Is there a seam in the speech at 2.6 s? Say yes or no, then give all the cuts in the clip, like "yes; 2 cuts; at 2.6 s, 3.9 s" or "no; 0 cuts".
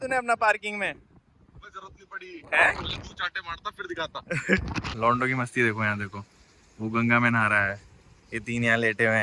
no; 1 cut; at 4.9 s